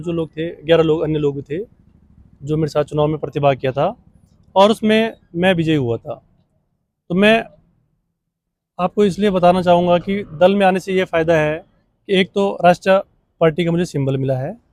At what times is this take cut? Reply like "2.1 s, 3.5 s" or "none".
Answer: none